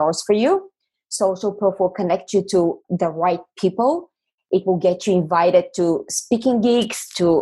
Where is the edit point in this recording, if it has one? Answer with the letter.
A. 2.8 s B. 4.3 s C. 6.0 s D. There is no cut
A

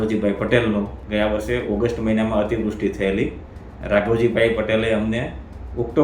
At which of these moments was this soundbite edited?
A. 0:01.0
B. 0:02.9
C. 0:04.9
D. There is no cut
A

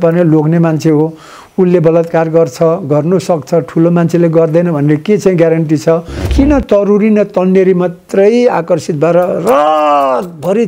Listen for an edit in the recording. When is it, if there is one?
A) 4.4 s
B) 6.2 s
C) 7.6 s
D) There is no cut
B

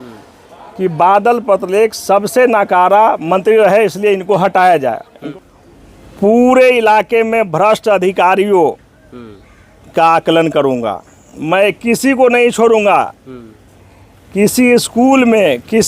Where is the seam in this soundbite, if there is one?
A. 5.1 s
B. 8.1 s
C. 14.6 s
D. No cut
A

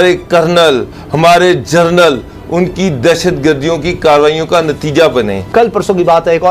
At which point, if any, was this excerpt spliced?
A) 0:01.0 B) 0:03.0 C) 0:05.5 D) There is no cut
C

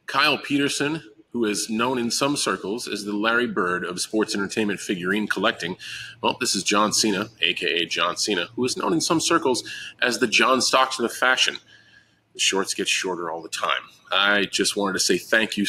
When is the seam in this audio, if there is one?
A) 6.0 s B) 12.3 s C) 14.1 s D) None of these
D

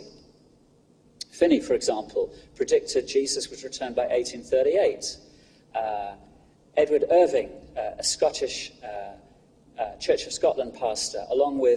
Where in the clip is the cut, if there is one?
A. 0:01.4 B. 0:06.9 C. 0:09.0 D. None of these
B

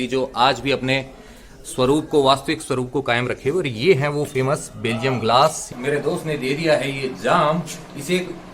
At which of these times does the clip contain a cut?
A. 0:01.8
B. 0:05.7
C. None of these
B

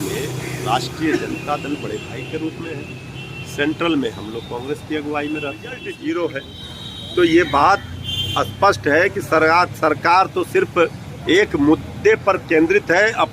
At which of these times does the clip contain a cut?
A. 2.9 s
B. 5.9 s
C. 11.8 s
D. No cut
B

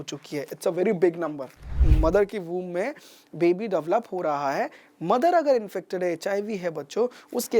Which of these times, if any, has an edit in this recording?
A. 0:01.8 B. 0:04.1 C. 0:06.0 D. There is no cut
A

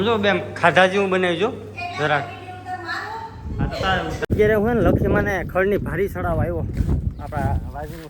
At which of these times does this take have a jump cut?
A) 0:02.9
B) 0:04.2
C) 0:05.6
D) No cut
B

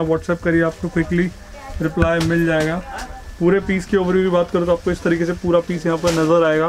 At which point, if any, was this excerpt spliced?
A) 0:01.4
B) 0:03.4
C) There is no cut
C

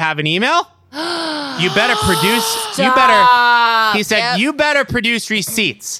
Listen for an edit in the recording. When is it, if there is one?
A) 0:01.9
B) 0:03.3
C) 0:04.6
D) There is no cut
D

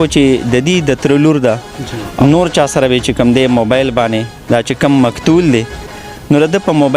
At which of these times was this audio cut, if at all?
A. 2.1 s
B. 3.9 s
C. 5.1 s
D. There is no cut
A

